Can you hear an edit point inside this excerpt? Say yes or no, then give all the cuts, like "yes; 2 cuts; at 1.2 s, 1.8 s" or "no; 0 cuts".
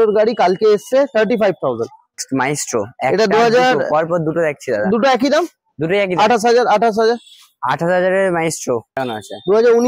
yes; 2 cuts; at 2.2 s, 9.0 s